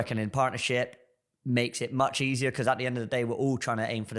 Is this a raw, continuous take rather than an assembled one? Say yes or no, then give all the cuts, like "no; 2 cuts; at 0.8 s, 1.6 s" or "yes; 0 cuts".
yes; 0 cuts